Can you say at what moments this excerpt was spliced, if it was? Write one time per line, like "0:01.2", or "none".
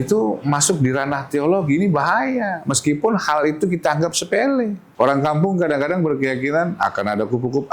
0:04.8